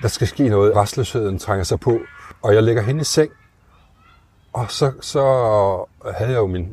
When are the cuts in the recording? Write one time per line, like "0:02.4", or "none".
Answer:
0:00.7
0:02.3